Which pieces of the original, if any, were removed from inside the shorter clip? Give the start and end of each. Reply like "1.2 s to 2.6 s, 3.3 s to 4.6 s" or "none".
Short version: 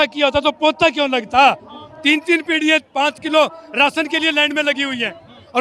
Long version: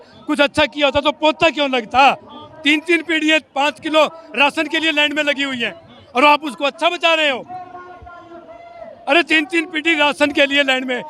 none